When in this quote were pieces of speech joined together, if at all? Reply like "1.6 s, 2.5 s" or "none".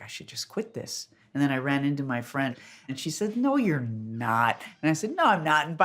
1.2 s, 2.6 s